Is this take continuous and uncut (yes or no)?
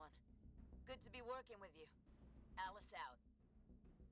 no